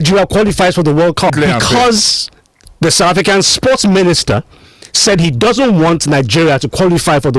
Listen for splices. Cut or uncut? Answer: cut